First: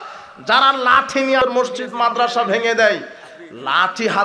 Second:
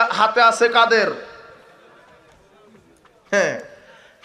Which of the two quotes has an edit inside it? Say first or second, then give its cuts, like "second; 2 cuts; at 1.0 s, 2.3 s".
first; 1 cut; at 1.4 s